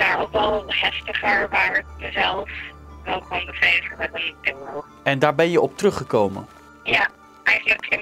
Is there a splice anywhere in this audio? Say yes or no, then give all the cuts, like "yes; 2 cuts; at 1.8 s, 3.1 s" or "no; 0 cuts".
yes; 1 cut; at 4.9 s